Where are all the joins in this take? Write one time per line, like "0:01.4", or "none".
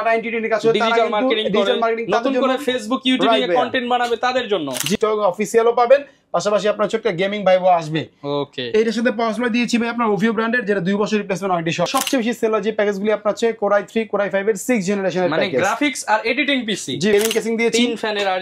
0:04.9
0:11.9
0:17.1